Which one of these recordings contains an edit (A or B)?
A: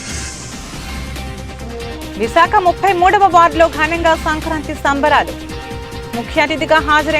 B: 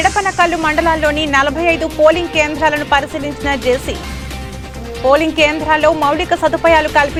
A